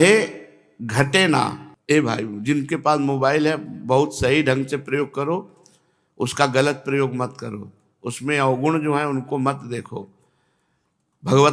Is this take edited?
yes; 1 cut; at 1.7 s

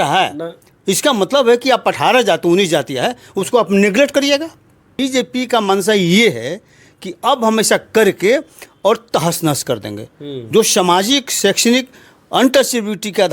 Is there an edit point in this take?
yes; 1 cut; at 5.0 s

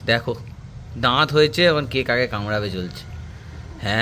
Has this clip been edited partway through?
no; 0 cuts

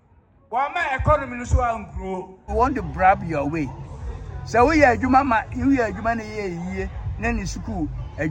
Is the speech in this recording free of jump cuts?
no; 1 cut; at 2.5 s

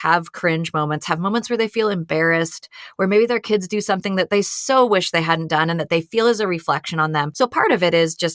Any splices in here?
yes; 1 cut; at 7.3 s

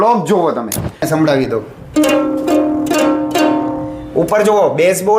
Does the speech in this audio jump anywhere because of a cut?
yes; 1 cut; at 1.1 s

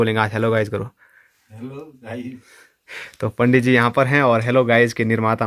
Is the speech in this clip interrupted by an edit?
no; 0 cuts

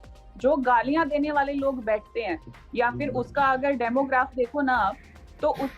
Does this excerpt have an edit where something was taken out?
no; 0 cuts

